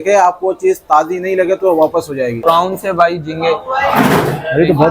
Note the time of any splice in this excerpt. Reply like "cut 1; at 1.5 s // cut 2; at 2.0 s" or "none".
cut 1; at 2.4 s